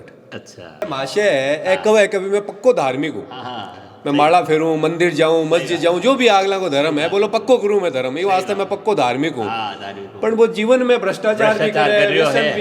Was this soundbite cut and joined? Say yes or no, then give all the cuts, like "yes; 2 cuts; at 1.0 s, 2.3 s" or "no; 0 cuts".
yes; 1 cut; at 0.9 s